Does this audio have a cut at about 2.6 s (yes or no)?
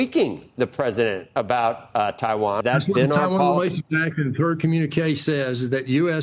yes